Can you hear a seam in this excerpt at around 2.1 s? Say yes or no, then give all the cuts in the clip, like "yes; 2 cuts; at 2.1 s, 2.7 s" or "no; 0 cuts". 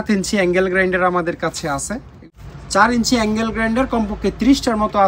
yes; 1 cut; at 2.1 s